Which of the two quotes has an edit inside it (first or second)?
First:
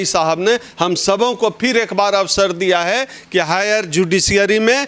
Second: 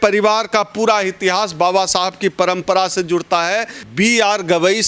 second